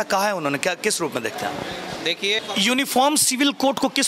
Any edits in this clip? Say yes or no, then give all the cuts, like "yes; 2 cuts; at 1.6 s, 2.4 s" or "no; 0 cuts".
yes; 1 cut; at 2.4 s